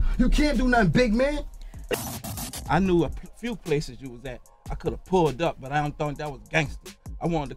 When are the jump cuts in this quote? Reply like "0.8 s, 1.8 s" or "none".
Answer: 2.1 s